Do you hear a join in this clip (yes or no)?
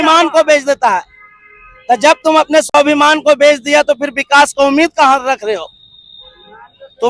no